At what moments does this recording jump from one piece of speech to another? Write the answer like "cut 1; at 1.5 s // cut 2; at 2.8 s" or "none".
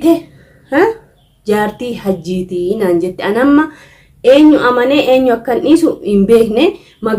none